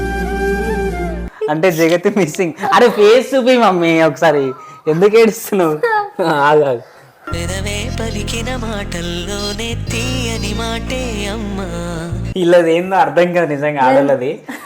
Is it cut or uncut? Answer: cut